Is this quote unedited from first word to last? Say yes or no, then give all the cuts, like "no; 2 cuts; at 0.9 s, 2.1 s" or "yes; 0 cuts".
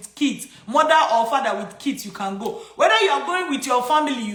yes; 0 cuts